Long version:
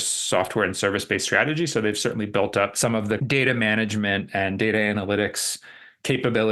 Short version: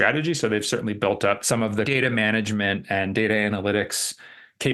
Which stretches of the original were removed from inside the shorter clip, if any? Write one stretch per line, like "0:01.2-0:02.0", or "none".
0:03.2-0:03.3